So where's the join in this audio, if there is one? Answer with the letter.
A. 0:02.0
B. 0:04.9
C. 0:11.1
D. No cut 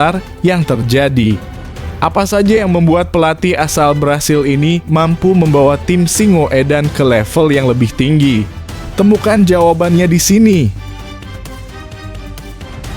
C